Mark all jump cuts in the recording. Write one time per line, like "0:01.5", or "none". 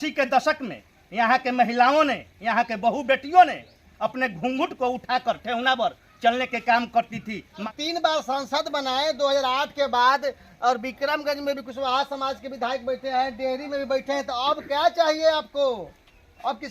0:07.6